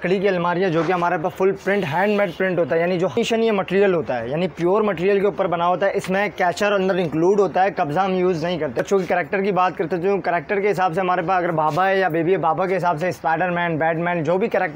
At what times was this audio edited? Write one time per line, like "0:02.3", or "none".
0:03.2
0:08.8